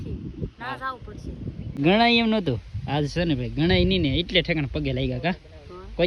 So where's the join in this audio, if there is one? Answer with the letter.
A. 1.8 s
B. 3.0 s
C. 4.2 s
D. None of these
A